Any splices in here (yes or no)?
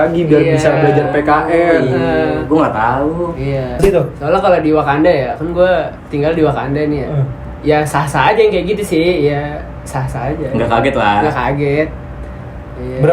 yes